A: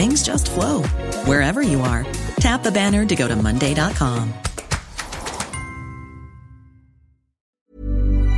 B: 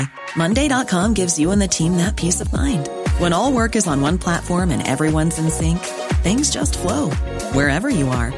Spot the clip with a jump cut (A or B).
A